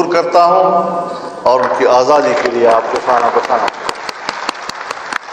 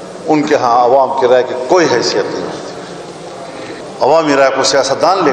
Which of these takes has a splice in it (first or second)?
second